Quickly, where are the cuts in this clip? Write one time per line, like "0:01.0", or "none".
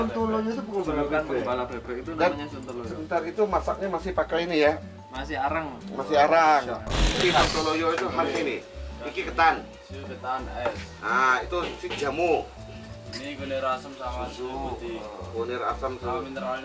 0:07.2